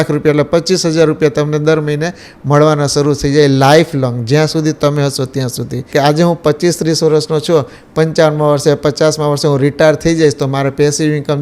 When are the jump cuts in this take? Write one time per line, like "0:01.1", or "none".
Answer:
0:05.9